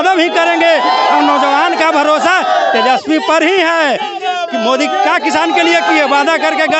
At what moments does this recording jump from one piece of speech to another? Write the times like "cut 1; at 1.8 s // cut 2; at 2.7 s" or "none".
none